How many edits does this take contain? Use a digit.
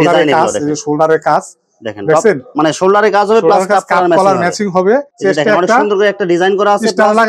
0